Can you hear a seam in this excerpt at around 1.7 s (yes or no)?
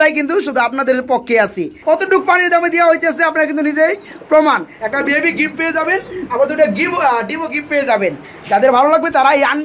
yes